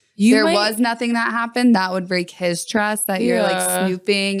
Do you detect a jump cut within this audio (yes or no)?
no